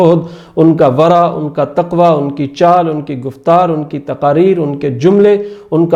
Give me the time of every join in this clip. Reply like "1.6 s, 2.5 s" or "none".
none